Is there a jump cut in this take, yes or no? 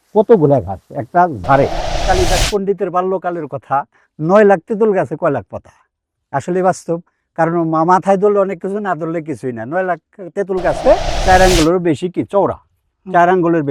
yes